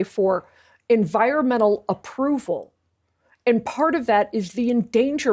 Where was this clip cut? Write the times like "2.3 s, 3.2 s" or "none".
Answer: none